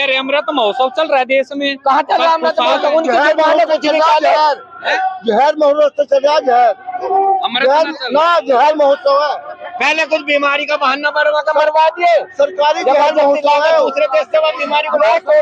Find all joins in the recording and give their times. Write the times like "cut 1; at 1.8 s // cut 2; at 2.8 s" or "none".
none